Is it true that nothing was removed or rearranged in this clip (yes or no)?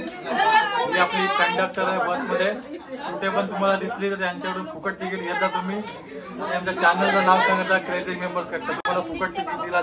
yes